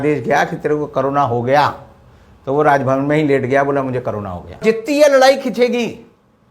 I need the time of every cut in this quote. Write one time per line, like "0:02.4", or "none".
0:04.6